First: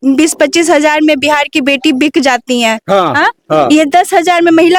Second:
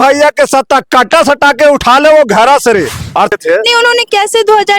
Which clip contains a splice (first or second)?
second